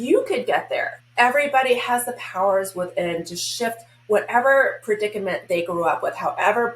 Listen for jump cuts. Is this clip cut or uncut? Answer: cut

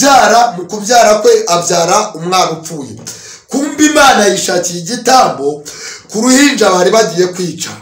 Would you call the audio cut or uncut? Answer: uncut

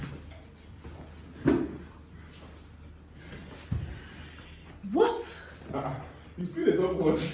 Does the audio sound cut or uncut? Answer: uncut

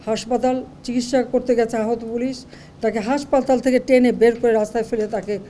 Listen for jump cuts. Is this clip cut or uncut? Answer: uncut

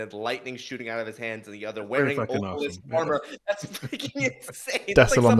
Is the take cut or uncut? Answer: uncut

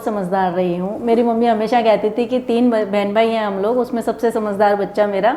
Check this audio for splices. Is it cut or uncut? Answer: uncut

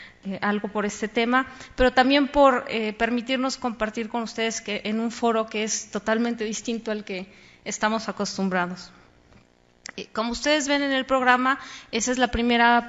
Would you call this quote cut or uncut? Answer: cut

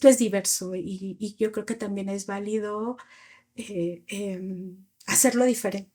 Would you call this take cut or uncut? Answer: uncut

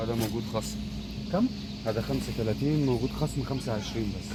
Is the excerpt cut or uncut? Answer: uncut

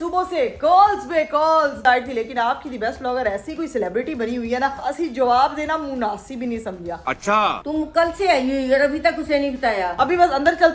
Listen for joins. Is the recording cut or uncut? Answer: cut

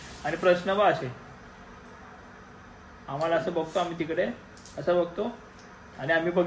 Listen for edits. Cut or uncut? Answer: uncut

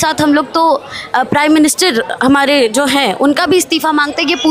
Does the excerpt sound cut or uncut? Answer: uncut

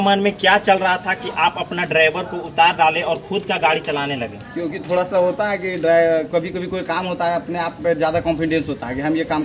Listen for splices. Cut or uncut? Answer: uncut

